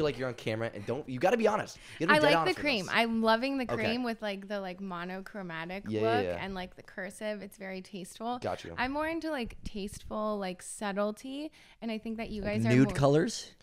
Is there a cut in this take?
no; 0 cuts

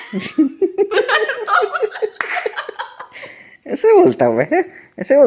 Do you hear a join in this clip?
no; 0 cuts

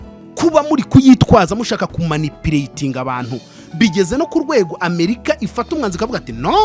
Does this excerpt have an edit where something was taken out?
no; 0 cuts

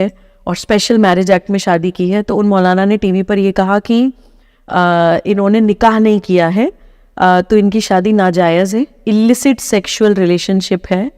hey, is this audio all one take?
yes; 0 cuts

